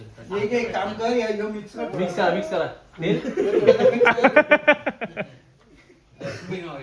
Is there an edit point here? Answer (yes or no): no